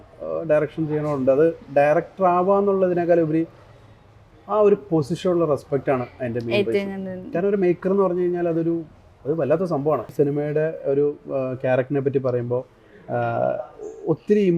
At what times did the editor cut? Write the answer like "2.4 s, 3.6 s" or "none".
10.1 s